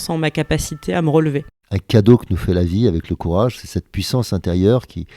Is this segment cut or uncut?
cut